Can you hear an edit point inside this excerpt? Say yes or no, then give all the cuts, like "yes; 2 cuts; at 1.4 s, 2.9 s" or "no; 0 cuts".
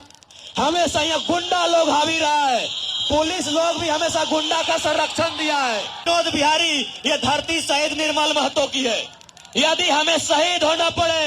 yes; 1 cut; at 6.0 s